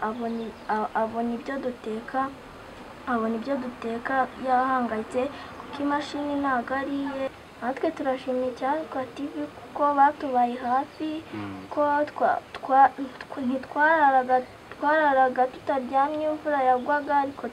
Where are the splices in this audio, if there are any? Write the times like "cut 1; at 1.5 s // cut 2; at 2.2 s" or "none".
cut 1; at 7.4 s